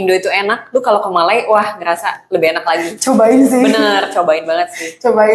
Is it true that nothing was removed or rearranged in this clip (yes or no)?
yes